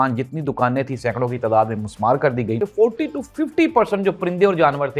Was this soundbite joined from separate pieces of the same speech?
yes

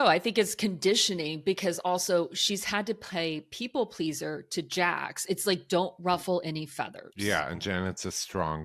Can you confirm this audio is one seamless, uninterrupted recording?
yes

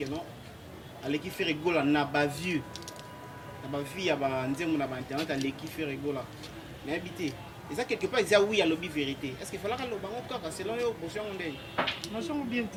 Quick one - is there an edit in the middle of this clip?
no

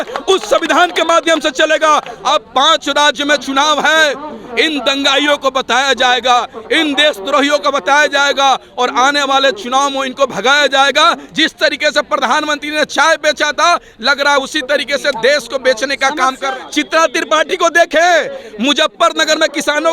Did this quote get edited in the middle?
yes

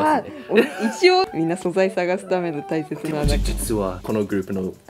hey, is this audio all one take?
no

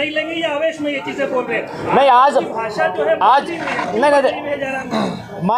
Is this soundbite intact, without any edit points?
yes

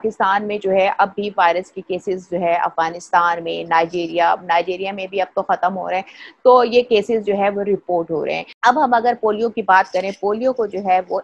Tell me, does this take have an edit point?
yes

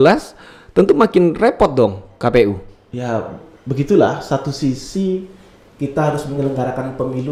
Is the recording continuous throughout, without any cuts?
yes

